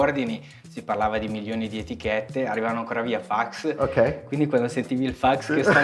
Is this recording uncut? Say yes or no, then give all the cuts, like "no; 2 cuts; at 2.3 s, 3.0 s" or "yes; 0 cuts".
yes; 0 cuts